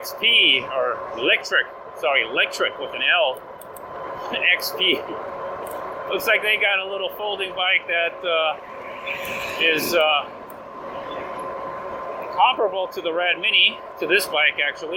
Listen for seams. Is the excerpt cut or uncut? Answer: uncut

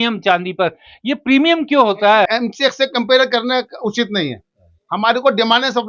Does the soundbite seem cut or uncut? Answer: cut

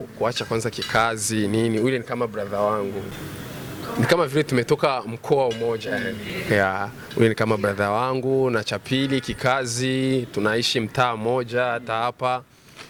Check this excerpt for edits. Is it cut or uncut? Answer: uncut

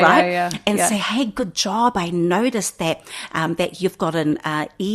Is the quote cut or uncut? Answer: uncut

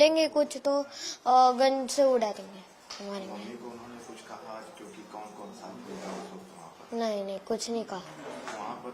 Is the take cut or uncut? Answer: uncut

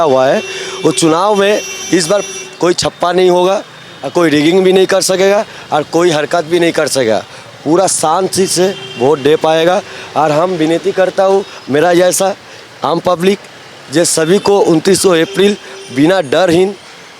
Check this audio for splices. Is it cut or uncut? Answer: uncut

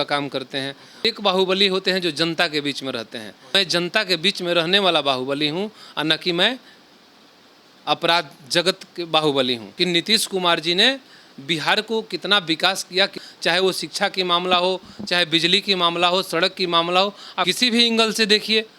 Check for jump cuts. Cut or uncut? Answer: cut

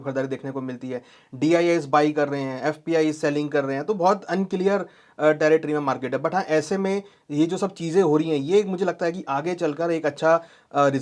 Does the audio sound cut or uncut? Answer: uncut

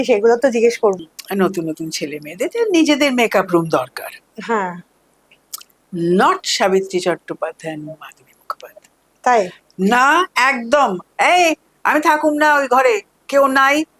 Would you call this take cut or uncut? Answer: cut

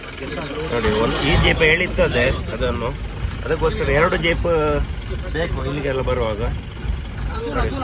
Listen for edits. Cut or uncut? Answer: uncut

